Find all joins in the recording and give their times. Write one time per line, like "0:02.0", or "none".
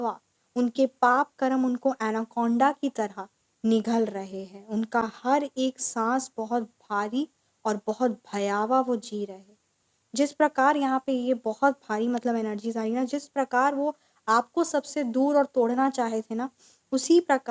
none